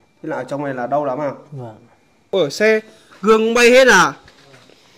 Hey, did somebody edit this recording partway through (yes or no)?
yes